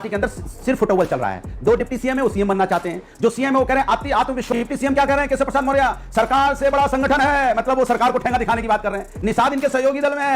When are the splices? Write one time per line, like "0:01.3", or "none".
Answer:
0:04.4